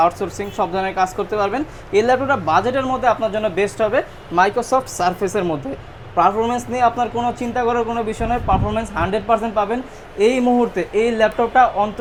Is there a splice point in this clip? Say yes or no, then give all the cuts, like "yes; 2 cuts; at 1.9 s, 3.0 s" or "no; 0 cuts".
no; 0 cuts